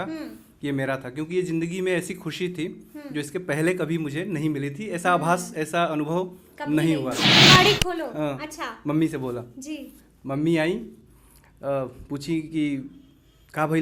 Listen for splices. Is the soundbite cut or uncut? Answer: cut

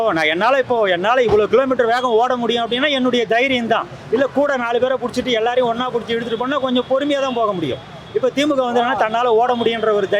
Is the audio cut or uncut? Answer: uncut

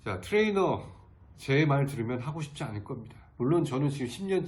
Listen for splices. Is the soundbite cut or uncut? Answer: uncut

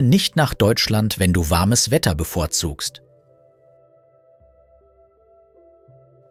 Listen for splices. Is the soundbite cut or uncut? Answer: uncut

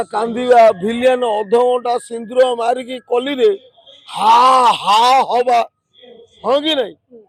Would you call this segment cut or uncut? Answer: uncut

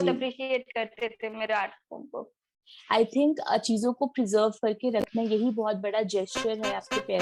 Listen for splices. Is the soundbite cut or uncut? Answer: uncut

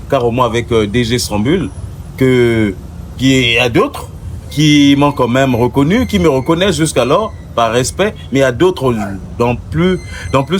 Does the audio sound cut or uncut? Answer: uncut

